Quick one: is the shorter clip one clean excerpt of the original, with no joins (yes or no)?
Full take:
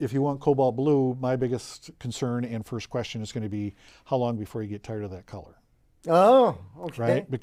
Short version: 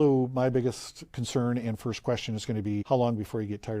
no